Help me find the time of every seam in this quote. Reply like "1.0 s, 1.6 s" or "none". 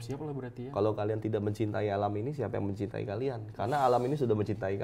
none